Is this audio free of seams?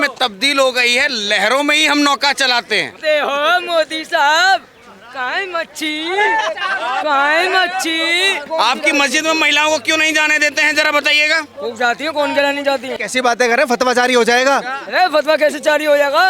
no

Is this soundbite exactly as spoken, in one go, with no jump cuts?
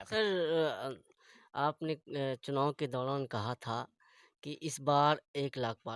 yes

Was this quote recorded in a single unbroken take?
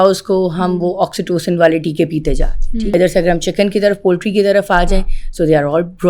no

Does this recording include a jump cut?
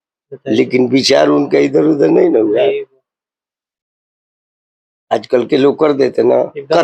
no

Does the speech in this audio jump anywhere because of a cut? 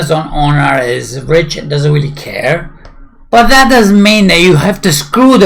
no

